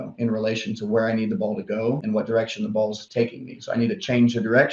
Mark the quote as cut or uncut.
cut